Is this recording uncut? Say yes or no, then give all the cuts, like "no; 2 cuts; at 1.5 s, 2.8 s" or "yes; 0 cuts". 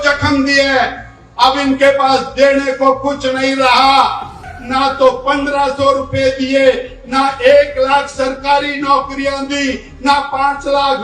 no; 1 cut; at 4.4 s